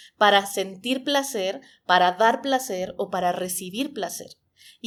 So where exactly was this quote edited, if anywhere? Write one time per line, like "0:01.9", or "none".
none